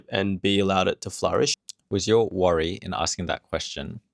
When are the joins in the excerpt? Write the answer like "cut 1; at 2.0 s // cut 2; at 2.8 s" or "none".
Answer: cut 1; at 1.7 s